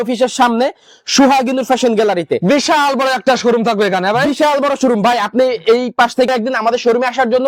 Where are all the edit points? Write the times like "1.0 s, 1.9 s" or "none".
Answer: 6.3 s